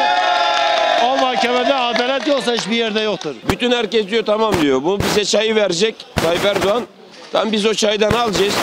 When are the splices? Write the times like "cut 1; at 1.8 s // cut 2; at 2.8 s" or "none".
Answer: cut 1; at 3.3 s